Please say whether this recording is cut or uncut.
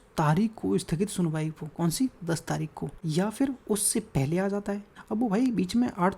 cut